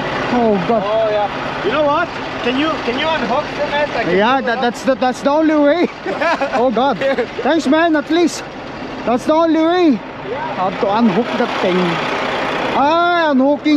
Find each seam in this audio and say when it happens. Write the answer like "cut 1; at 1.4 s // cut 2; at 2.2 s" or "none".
none